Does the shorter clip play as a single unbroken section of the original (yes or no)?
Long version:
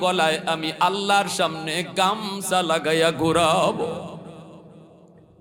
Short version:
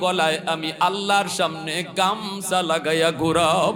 yes